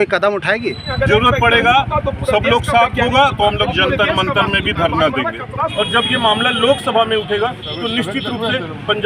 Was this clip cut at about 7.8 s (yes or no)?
no